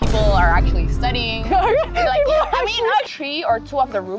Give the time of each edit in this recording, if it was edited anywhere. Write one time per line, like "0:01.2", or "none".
0:03.0

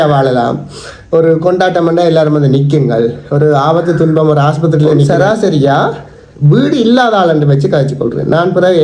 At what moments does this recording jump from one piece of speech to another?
0:05.1

